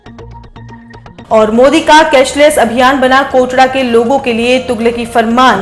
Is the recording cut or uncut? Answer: cut